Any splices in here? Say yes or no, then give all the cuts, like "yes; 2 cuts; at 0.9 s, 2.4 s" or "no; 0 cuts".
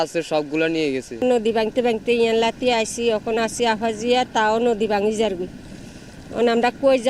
no; 0 cuts